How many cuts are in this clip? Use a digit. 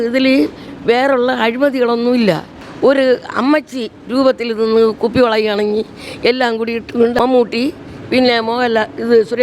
2